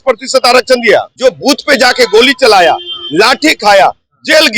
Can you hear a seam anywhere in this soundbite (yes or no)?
yes